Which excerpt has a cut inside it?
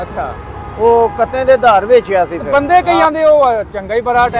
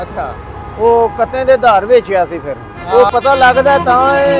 second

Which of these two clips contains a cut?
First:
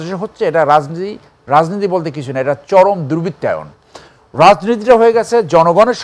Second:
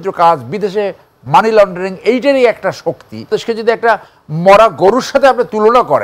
second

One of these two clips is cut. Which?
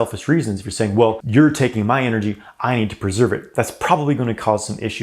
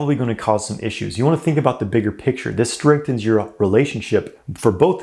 first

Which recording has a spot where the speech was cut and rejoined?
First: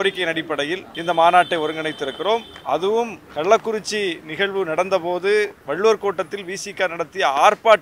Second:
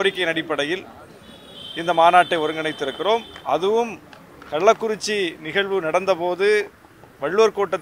first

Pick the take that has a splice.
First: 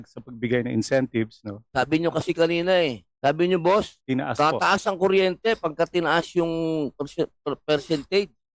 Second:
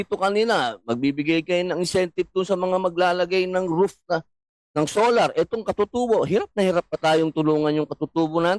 first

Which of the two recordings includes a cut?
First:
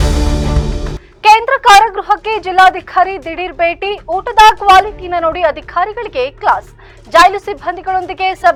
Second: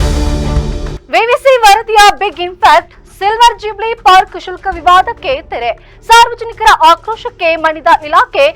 second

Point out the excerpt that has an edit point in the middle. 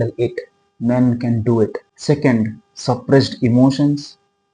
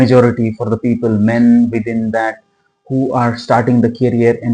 first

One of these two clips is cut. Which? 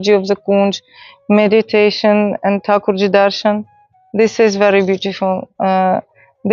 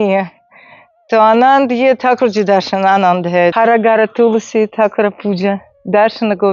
second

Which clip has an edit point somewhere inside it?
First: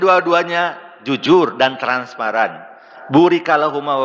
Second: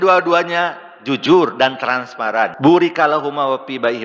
second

